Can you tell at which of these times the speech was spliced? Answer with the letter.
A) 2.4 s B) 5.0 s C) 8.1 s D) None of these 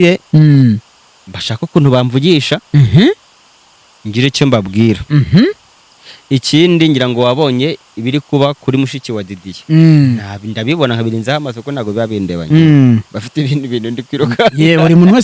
D